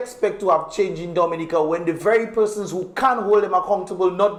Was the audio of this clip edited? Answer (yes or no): no